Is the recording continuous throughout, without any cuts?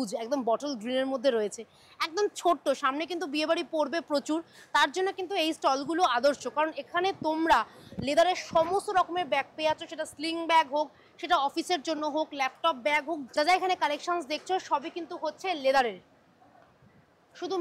yes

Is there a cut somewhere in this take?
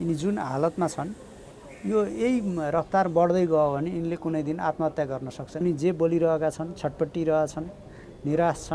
yes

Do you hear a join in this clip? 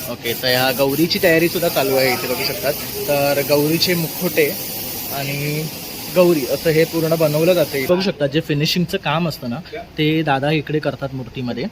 yes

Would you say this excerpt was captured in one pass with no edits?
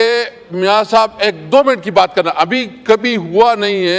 yes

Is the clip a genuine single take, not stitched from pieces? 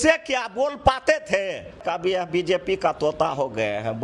no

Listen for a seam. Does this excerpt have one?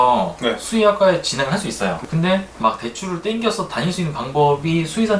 yes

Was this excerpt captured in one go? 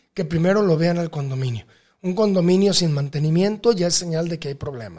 yes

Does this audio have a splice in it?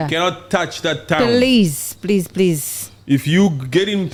no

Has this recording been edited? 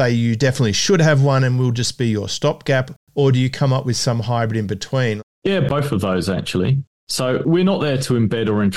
yes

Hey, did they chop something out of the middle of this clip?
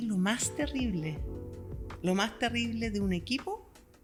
no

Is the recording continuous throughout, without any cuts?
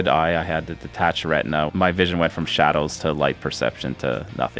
no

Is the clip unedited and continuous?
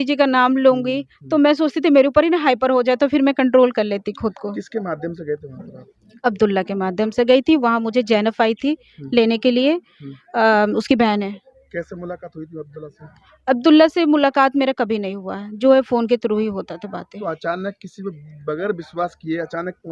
yes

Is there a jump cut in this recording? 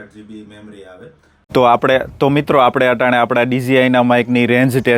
yes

